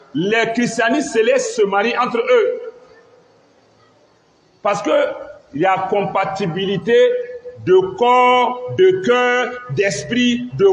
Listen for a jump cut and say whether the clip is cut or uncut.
uncut